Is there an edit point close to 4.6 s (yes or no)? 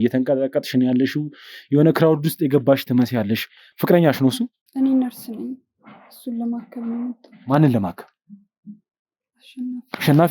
yes